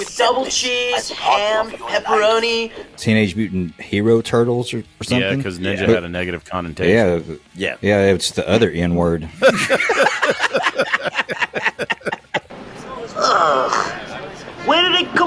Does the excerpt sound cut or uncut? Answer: cut